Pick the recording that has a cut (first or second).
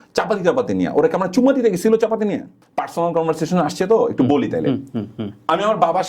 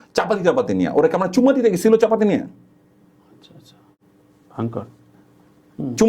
first